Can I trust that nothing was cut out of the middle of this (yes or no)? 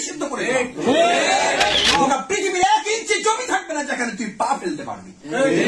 no